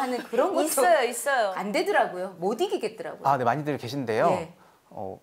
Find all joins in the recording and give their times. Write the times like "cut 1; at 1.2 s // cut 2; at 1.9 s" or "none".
cut 1; at 1.5 s